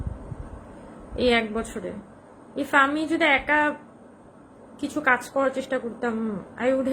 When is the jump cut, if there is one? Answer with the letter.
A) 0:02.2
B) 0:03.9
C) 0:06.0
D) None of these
D